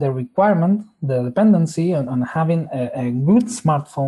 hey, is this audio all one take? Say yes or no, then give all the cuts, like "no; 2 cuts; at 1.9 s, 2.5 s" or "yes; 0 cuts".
yes; 0 cuts